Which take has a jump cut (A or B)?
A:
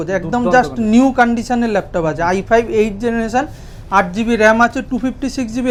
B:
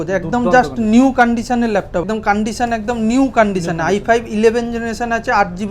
B